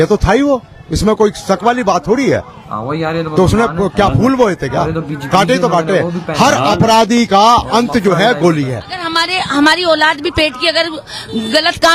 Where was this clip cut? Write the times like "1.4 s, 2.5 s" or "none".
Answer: 9.0 s